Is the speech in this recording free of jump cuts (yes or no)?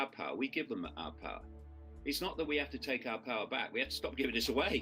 yes